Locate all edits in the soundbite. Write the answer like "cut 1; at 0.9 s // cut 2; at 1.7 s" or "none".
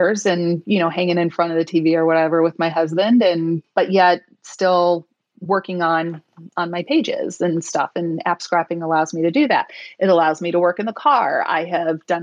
cut 1; at 3.7 s